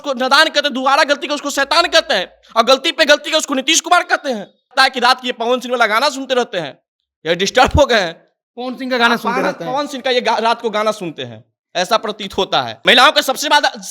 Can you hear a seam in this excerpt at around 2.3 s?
no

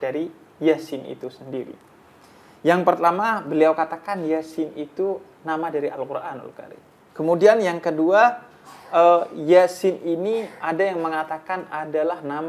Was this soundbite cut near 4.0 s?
no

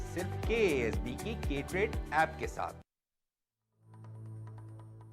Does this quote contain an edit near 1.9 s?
no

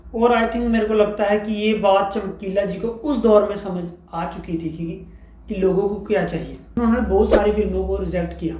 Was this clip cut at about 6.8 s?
yes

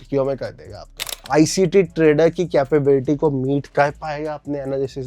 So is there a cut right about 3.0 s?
no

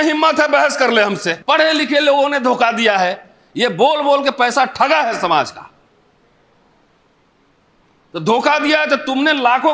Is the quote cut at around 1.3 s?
yes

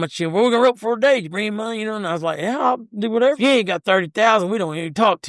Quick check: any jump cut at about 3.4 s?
yes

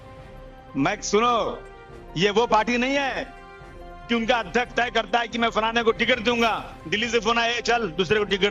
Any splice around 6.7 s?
no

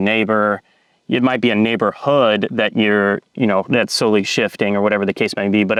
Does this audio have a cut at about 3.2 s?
no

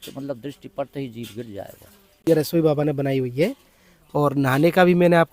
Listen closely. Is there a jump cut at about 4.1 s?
no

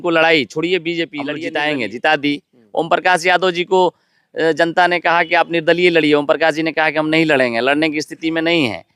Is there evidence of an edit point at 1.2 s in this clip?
yes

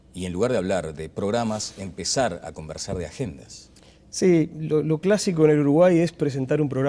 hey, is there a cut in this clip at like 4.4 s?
no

